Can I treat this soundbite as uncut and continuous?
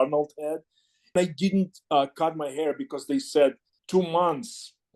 no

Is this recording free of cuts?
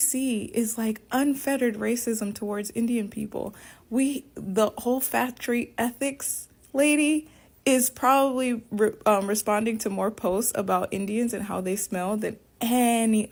yes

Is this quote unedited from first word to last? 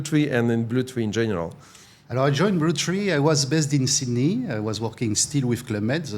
yes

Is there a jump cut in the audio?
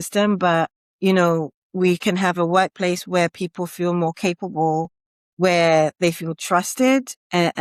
no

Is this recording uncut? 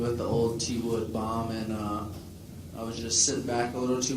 no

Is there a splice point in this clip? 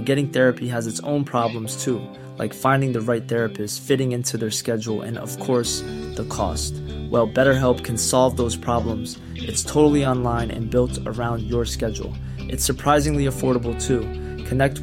no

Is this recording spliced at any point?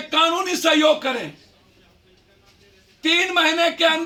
no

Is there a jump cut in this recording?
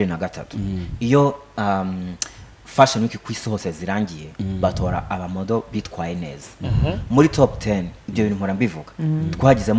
no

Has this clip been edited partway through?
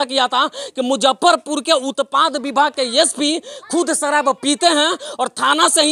no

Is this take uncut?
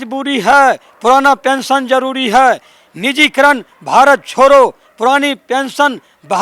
yes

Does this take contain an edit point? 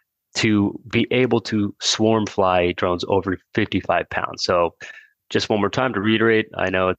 no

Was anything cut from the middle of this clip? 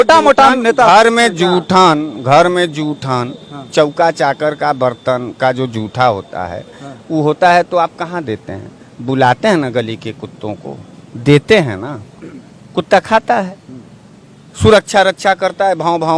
no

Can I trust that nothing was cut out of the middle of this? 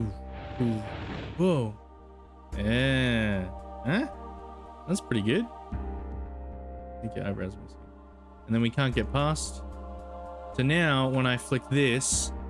yes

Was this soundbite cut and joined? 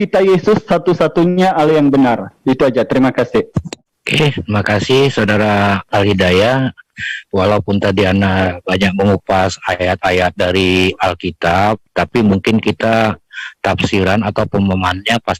no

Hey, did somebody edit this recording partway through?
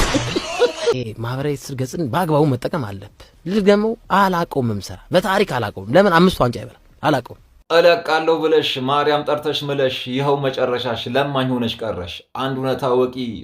yes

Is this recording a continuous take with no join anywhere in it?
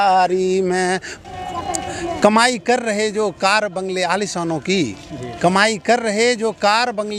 no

